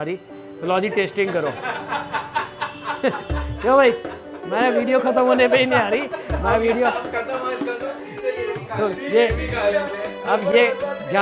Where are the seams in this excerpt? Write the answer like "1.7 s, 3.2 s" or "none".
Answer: none